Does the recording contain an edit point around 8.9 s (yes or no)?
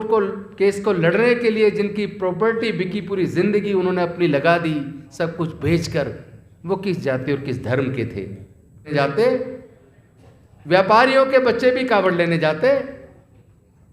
yes